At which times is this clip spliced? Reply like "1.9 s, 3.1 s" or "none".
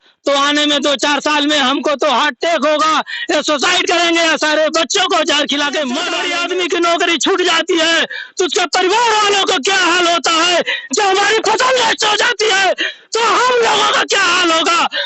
6.2 s